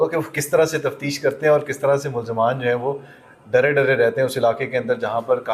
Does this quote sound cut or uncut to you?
uncut